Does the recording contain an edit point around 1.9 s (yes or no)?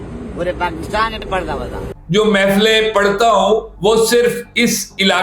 yes